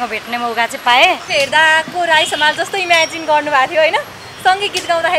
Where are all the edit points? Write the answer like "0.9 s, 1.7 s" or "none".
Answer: 1.2 s